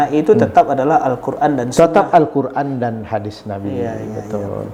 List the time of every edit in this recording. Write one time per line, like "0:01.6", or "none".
none